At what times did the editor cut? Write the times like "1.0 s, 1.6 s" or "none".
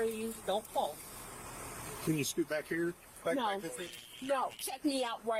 none